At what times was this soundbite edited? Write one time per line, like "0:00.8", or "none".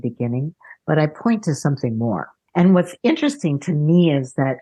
0:02.3